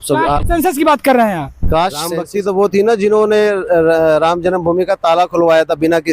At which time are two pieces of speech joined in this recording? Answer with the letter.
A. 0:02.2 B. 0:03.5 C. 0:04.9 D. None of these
A